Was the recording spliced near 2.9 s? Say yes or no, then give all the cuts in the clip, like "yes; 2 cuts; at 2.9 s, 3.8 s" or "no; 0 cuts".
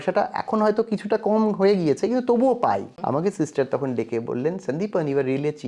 yes; 1 cut; at 2.9 s